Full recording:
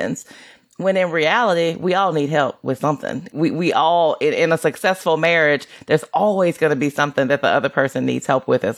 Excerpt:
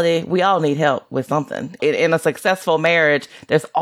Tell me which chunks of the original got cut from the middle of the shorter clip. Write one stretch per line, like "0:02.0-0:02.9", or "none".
0:03.3-0:04.2